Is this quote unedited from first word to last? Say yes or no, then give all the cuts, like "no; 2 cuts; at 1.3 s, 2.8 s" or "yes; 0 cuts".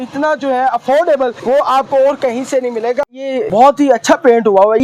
no; 1 cut; at 3.1 s